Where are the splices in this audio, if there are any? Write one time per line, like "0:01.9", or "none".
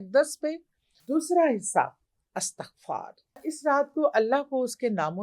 0:00.9
0:03.5